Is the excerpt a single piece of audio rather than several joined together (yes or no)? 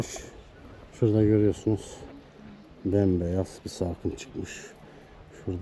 yes